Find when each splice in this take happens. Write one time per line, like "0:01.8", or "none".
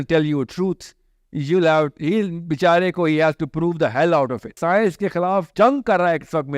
0:04.6
0:05.5